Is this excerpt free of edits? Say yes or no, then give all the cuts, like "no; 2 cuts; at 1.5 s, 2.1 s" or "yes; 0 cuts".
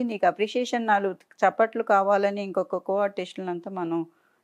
yes; 0 cuts